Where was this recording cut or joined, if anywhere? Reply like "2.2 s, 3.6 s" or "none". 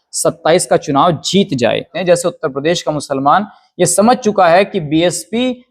2.0 s